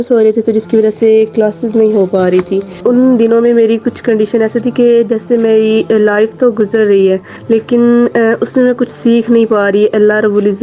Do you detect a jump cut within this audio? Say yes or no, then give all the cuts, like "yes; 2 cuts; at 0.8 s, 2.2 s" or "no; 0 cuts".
yes; 2 cuts; at 2.6 s, 7.3 s